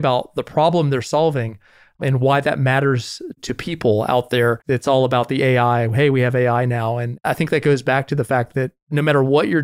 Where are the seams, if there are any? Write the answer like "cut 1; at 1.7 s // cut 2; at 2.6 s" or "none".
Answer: cut 1; at 4.6 s // cut 2; at 7.1 s